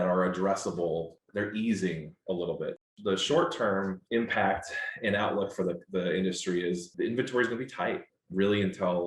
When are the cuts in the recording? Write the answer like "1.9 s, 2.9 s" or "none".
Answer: 1.2 s, 2.8 s, 4.0 s, 6.9 s, 8.1 s